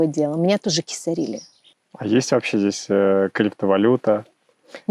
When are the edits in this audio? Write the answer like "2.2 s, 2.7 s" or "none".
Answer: 1.6 s